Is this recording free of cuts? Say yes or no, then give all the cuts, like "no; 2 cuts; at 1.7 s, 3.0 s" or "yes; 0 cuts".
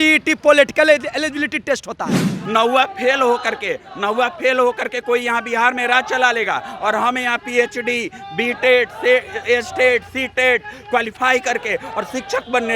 no; 1 cut; at 2.3 s